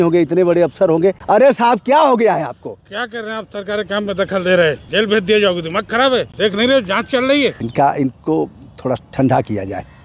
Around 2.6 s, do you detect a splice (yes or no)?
no